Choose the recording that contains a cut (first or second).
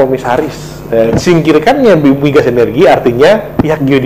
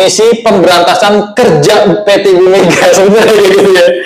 first